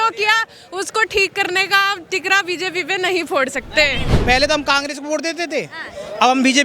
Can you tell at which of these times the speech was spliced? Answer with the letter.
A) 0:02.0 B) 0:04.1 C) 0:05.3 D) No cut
B